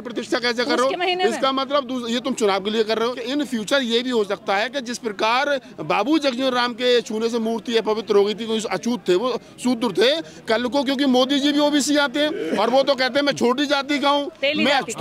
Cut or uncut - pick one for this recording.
cut